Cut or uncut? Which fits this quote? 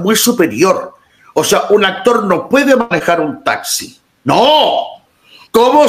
uncut